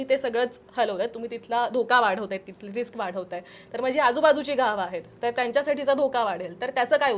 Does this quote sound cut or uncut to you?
uncut